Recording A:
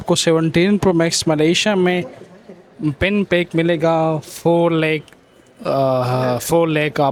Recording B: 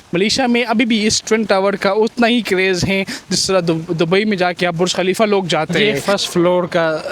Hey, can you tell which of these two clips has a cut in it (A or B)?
B